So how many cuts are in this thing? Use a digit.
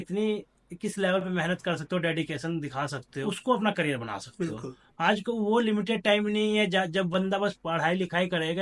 1